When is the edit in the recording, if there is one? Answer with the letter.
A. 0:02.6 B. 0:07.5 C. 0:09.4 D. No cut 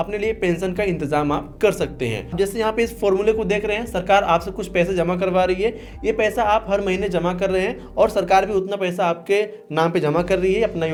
D